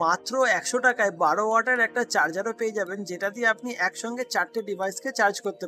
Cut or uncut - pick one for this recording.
uncut